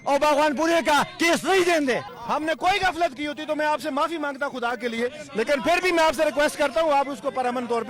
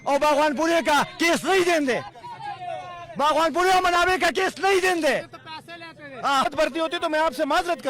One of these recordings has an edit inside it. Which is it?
first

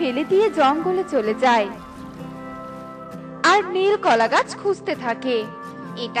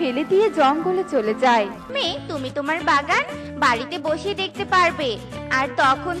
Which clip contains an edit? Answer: second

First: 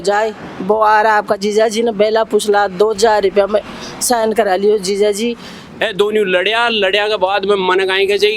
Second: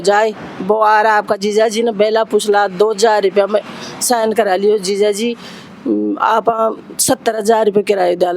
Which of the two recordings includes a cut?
first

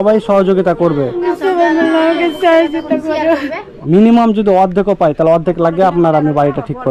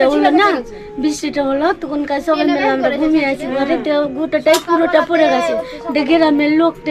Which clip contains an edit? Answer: first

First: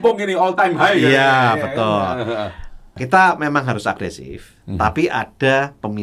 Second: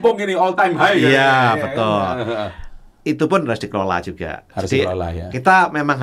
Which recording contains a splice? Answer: first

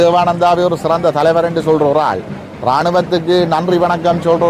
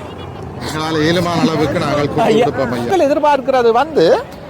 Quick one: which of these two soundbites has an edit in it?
second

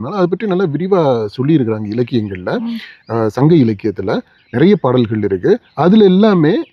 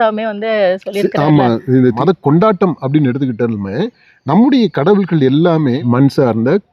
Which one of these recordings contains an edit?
second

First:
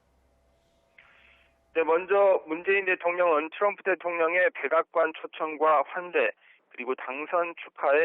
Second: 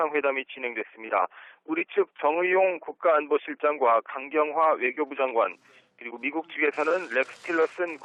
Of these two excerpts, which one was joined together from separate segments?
first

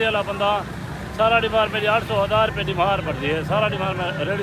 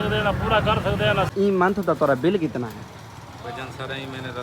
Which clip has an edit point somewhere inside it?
second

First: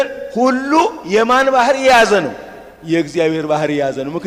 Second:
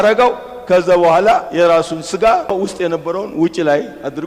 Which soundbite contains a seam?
second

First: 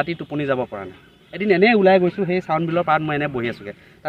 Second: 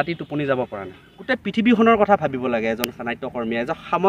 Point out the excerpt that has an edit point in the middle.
second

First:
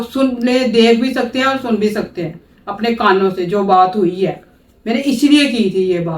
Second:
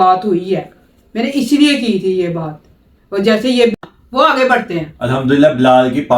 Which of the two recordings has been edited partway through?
second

